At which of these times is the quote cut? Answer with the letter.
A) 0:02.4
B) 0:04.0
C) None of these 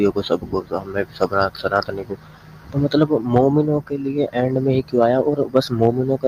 C